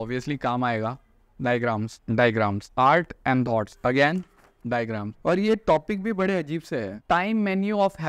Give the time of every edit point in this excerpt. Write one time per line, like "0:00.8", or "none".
0:02.0